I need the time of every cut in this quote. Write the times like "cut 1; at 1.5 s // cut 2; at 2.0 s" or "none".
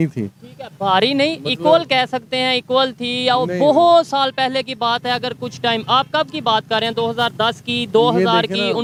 none